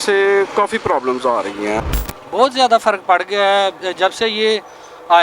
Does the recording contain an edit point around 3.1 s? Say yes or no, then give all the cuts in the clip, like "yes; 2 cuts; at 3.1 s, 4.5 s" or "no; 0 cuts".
no; 1 cut; at 1.8 s